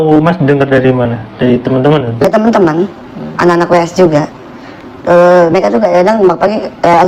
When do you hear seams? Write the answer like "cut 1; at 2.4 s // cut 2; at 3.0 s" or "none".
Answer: none